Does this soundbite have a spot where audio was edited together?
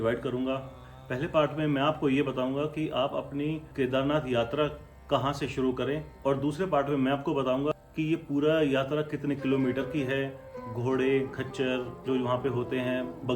yes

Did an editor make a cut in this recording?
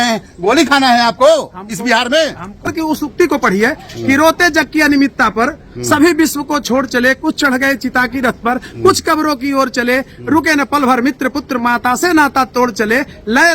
yes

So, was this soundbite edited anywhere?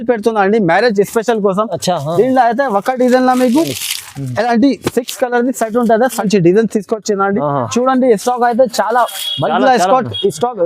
yes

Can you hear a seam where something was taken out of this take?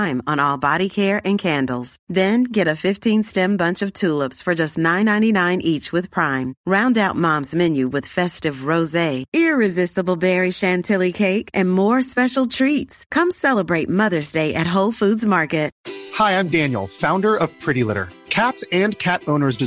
yes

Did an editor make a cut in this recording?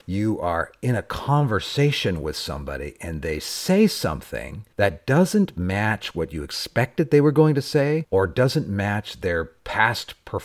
no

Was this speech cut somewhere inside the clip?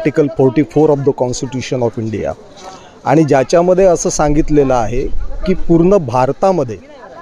no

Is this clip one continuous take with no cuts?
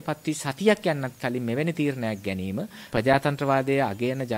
no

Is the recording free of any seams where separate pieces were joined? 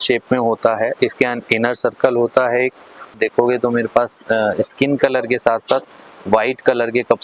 no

